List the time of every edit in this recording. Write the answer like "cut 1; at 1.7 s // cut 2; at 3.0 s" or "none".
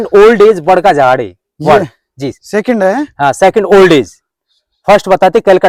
none